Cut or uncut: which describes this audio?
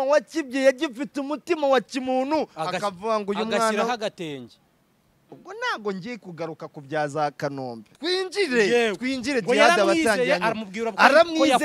cut